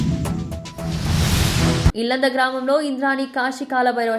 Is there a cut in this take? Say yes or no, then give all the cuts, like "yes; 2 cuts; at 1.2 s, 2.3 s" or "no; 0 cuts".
no; 0 cuts